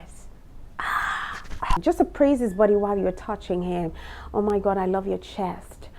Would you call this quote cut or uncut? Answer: cut